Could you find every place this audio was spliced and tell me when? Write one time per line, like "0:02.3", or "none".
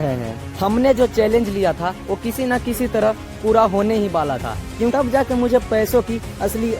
0:04.9